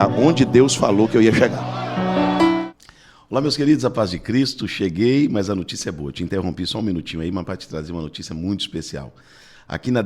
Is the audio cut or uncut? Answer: cut